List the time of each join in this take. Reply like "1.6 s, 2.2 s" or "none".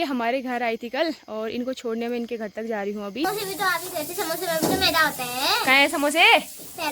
3.3 s